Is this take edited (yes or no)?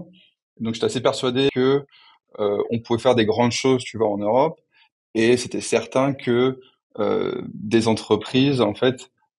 yes